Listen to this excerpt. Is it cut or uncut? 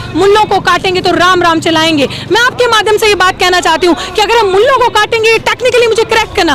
uncut